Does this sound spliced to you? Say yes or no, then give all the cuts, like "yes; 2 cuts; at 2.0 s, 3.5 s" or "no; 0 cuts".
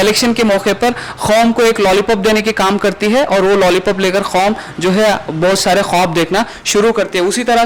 no; 0 cuts